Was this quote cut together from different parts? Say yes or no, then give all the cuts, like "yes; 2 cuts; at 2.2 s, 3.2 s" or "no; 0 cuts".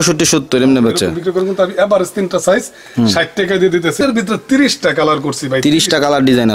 yes; 1 cut; at 4.0 s